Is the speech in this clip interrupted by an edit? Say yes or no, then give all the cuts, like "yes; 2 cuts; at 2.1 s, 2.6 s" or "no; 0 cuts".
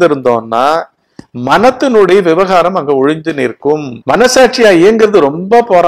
yes; 1 cut; at 3.9 s